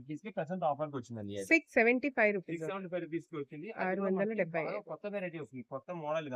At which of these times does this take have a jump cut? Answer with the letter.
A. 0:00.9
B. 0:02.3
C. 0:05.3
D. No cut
D